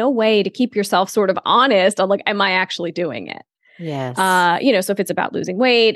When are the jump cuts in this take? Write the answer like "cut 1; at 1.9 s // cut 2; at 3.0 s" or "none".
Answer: none